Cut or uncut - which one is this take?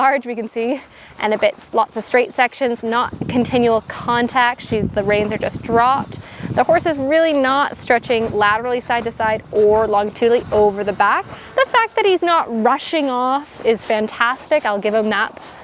uncut